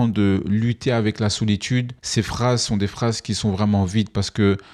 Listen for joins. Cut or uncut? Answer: uncut